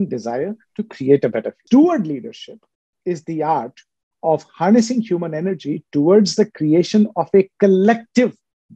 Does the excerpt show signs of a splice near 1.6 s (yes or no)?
yes